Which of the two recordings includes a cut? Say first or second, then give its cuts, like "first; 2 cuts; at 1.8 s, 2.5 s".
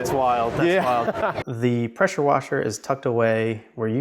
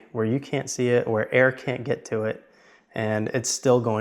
first; 1 cut; at 1.4 s